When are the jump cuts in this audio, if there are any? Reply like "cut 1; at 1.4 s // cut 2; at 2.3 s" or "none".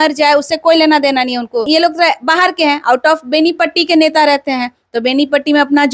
cut 1; at 1.7 s